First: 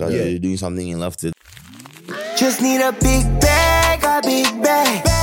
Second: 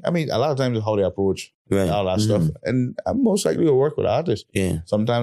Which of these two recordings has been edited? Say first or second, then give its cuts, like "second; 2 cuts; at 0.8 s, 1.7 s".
first; 1 cut; at 1.3 s